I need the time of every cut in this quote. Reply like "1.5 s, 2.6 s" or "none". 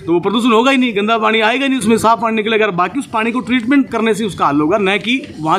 none